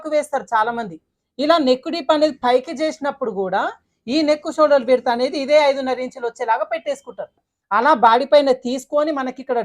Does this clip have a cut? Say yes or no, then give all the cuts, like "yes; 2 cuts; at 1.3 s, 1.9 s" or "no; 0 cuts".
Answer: yes; 1 cut; at 7.5 s